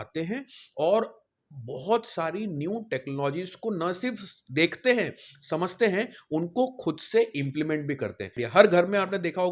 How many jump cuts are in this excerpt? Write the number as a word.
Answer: one